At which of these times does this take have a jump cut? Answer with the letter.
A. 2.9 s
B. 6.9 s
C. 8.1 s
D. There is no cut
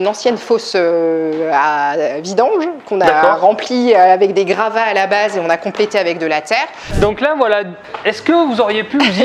B